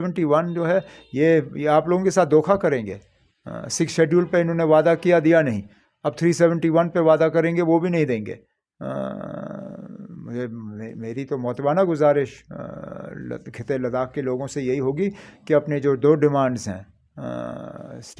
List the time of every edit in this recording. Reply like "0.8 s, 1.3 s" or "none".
none